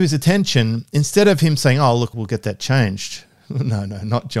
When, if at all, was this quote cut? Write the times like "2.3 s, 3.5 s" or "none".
2.1 s